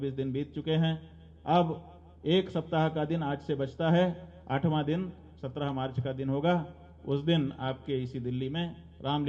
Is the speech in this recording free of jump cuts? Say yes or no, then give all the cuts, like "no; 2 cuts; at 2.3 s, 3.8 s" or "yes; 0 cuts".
yes; 0 cuts